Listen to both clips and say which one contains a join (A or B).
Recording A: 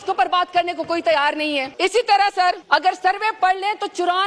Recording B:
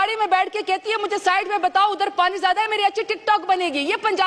A